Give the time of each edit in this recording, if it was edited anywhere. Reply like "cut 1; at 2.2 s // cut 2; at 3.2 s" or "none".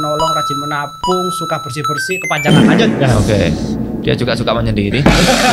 none